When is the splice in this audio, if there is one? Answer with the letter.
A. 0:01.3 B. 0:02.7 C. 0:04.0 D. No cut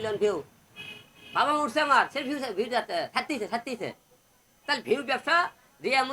D